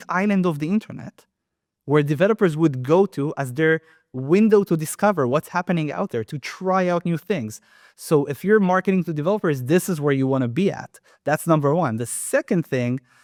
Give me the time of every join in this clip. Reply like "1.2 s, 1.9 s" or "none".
none